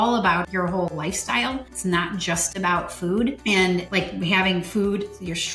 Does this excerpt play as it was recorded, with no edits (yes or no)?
no